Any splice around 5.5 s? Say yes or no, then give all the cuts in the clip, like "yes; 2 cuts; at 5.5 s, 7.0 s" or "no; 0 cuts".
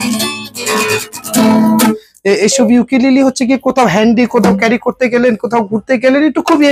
no; 1 cut; at 2.1 s